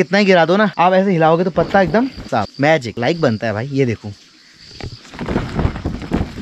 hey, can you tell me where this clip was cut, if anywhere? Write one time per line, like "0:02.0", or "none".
none